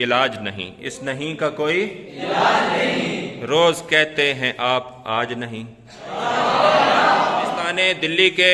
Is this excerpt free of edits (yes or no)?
no